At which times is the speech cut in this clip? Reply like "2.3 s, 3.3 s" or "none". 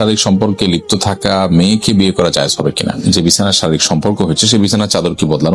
3.0 s

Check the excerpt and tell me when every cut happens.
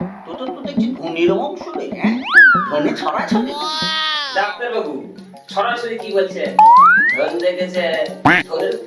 none

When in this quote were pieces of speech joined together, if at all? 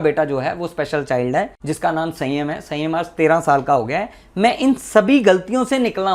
none

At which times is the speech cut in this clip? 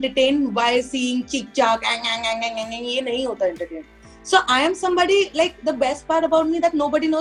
none

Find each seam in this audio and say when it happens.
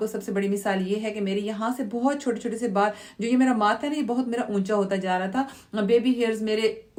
none

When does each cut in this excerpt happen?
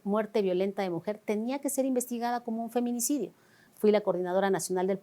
3.6 s

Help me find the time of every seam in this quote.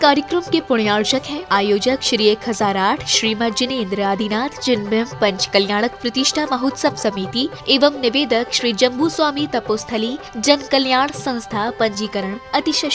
1.0 s

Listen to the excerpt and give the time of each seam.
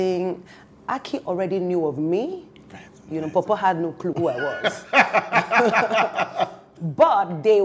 6.7 s

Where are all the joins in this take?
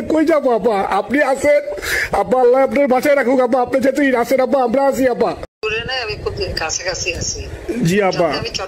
5.6 s, 7.5 s

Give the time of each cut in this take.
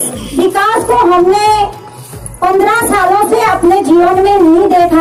none

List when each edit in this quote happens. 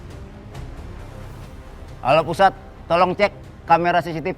2.0 s

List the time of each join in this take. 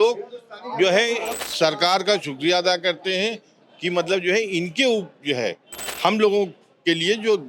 1.5 s

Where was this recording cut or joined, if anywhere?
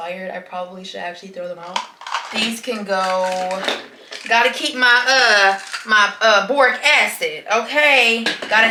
none

